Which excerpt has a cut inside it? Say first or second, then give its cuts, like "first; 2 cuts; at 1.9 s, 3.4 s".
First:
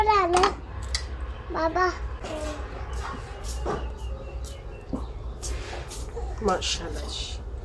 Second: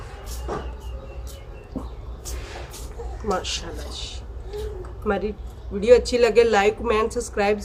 first; 1 cut; at 2.2 s